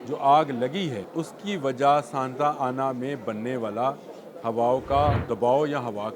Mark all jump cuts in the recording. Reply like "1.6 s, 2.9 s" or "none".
1.0 s, 5.2 s